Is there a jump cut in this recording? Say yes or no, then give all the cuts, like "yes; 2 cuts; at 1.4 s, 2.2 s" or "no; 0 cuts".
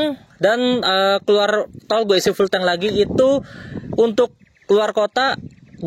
no; 0 cuts